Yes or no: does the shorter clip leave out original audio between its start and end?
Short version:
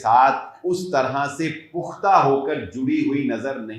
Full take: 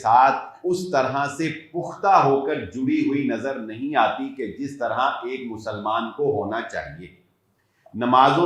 no